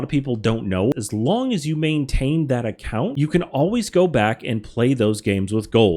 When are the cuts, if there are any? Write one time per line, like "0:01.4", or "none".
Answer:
0:00.9
0:03.1